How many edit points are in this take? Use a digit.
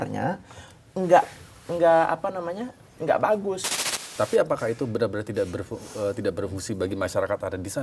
1